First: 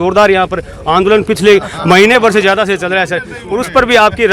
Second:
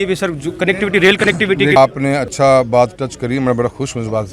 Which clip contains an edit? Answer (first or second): second